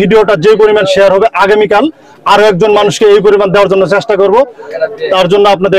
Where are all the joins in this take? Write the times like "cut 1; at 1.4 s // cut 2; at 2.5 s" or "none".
none